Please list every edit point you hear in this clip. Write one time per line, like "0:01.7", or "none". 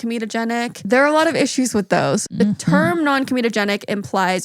0:00.8
0:02.3